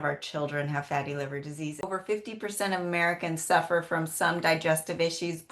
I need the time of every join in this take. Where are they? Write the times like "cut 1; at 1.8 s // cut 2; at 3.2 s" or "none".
cut 1; at 1.9 s

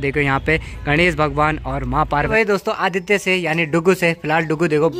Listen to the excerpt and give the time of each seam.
cut 1; at 2.3 s

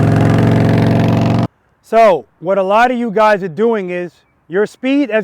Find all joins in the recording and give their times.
cut 1; at 1.5 s

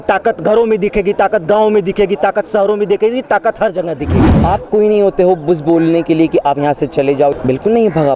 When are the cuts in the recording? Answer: cut 1; at 4.3 s // cut 2; at 7.3 s

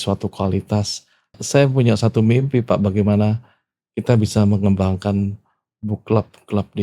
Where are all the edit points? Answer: cut 1; at 1.3 s

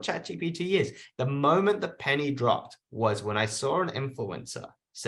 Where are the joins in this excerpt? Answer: cut 1; at 1.0 s

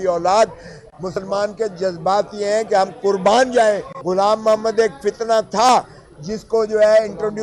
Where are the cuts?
cut 1; at 3.9 s

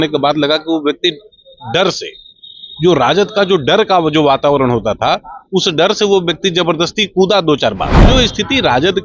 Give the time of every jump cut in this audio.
cut 1; at 8.1 s

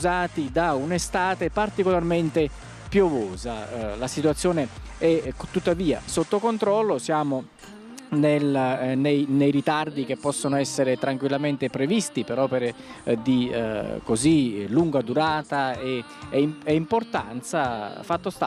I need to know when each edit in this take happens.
none

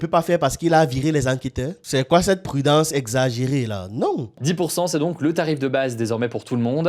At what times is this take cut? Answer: cut 1; at 1.8 s // cut 2; at 4.4 s

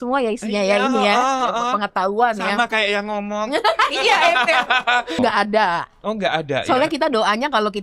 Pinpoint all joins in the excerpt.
cut 1; at 5.2 s

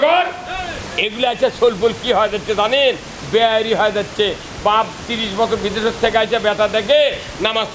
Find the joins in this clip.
none

